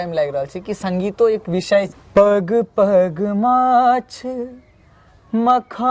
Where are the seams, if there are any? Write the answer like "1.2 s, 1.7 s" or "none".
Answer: 2.0 s